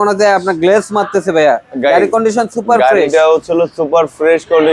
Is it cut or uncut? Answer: uncut